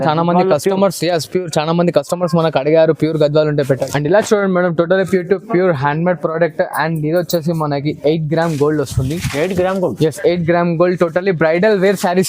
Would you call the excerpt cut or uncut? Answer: cut